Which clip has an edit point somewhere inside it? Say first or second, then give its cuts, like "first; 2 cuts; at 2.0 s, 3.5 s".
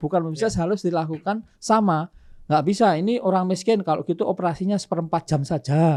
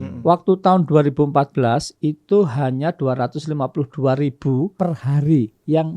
second; 1 cut; at 4.7 s